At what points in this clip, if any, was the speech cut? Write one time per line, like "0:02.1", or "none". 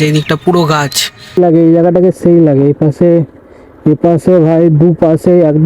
0:01.4